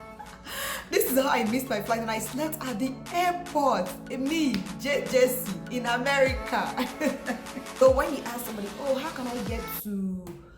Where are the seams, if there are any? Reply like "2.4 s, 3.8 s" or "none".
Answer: 7.8 s